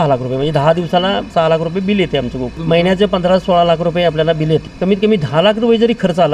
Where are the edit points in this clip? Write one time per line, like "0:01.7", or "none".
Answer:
0:01.3
0:02.5
0:04.7